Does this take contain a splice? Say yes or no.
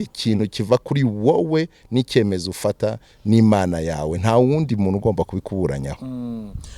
no